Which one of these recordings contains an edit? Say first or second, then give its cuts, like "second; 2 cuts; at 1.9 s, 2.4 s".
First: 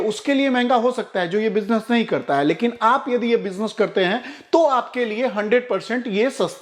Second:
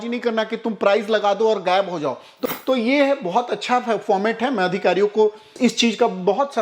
second; 2 cuts; at 2.4 s, 5.5 s